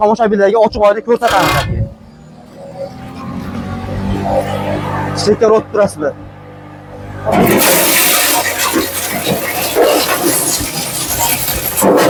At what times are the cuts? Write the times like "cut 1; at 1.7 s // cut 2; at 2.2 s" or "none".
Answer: none